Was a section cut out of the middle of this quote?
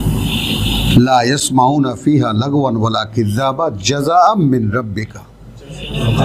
no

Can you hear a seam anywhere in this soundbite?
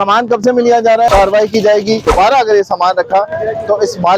yes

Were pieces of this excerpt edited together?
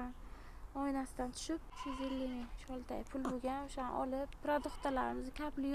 yes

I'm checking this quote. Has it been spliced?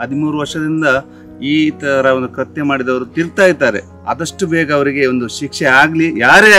yes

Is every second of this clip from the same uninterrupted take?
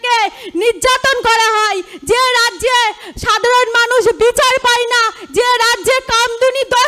yes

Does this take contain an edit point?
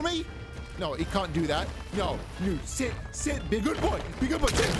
no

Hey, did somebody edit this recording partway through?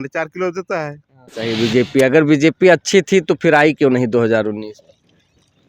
yes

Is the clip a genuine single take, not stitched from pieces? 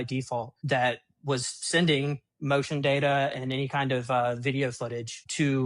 yes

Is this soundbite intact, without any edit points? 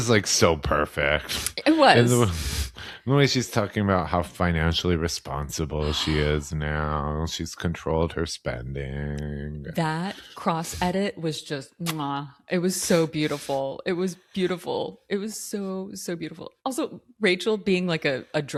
yes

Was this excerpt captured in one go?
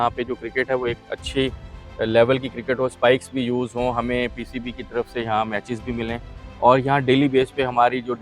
yes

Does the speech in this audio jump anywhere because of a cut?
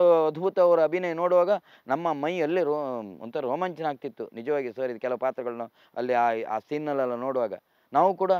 no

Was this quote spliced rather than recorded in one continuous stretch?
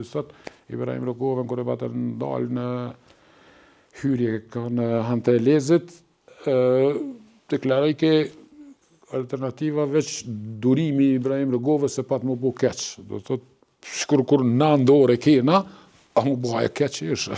no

